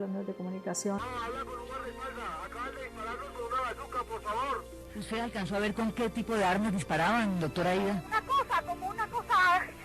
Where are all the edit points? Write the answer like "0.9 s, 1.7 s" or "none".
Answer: 1.0 s